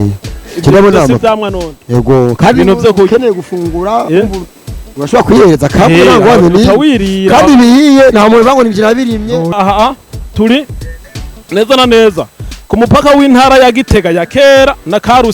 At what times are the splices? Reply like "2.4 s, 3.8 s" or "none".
9.5 s